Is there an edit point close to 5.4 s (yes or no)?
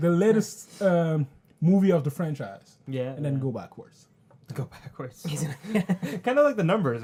no